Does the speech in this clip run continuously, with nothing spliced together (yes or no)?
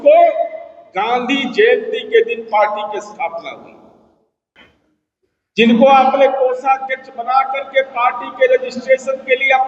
no